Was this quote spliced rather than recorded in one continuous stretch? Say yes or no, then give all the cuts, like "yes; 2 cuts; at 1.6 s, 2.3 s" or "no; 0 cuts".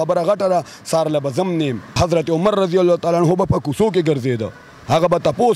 yes; 1 cut; at 2.0 s